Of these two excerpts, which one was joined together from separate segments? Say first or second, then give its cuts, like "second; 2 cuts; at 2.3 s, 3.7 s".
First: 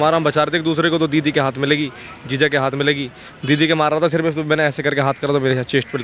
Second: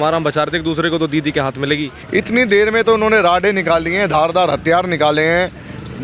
second; 1 cut; at 2.0 s